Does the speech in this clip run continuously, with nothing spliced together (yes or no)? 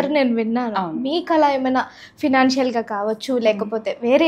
yes